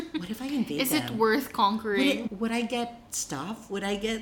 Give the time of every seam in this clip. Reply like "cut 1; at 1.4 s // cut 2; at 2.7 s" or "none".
cut 1; at 2.2 s